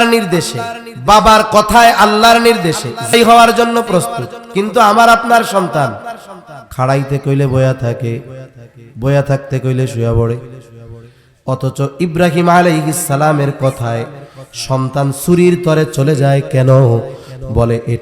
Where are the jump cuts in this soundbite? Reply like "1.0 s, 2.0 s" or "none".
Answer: 3.1 s